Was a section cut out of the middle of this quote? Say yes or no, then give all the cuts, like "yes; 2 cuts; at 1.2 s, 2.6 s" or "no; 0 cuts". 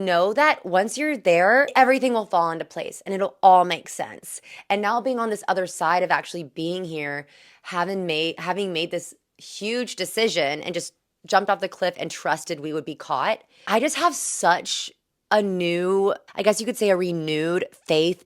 yes; 3 cuts; at 1.7 s, 13.5 s, 16.3 s